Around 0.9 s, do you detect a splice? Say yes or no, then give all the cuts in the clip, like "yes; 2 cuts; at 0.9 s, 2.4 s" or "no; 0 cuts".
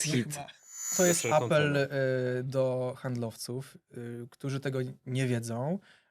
yes; 1 cut; at 0.9 s